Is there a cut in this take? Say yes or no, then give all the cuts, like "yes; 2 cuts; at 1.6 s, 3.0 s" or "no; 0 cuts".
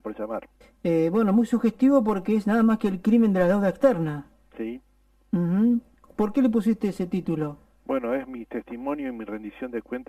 no; 0 cuts